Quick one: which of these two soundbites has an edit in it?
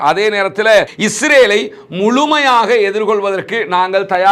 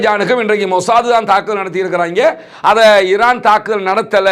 first; 1 cut; at 0.9 s

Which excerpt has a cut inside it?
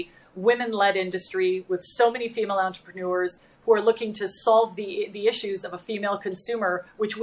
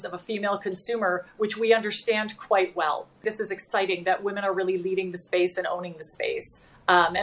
second; 1 cut; at 3.2 s

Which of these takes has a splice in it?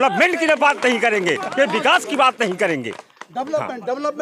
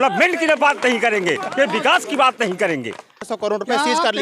second; 1 cut; at 3.3 s

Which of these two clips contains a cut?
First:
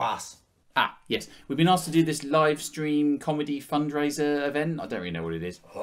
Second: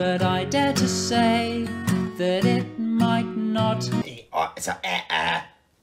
second; 1 cut; at 4.0 s

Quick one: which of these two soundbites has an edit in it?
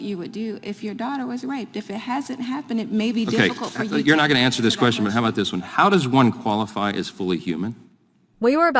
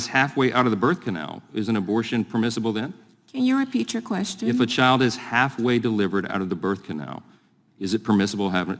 second; 1 cut; at 1.0 s

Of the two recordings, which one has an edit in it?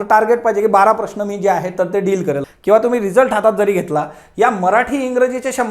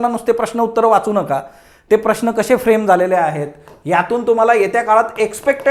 first; 1 cut; at 2.5 s

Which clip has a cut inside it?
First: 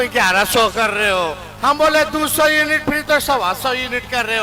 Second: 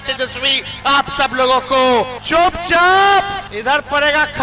second; 2 cuts; at 2.2 s, 3.5 s

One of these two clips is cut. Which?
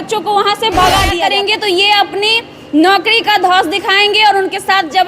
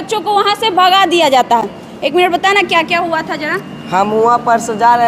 first; 1 cut; at 1.1 s

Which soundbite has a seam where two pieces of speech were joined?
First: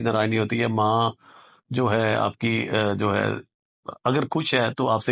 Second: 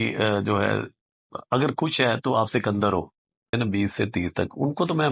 second; 1 cut; at 3.5 s

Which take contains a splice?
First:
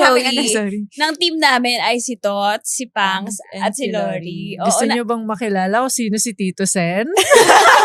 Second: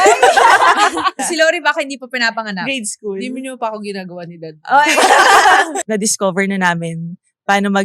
second; 2 cuts; at 1.2 s, 5.8 s

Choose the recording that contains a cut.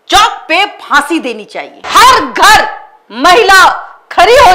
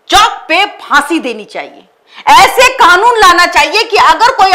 first; 1 cut; at 1.7 s

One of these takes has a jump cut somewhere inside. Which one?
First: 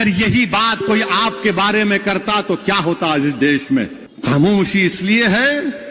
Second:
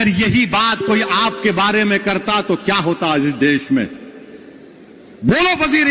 first; 1 cut; at 4.0 s

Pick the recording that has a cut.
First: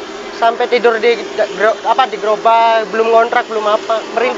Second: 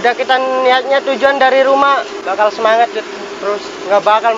second; 1 cut; at 2.2 s

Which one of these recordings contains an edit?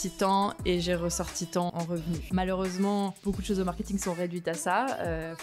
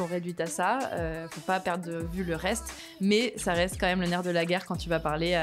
first; 2 cuts; at 1.7 s, 3.2 s

